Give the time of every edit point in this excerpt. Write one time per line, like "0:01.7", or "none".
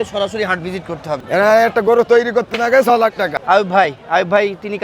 0:01.2
0:03.3